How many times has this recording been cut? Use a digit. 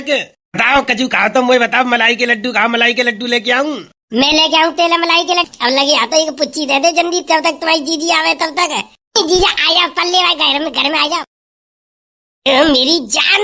1